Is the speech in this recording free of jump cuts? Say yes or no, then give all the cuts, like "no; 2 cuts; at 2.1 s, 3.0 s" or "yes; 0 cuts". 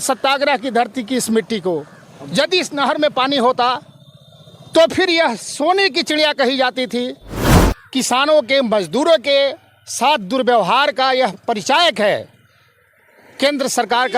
no; 1 cut; at 7.4 s